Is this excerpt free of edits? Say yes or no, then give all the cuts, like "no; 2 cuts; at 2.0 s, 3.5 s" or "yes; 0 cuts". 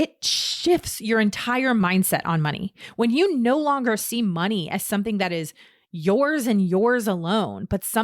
no; 1 cut; at 1.8 s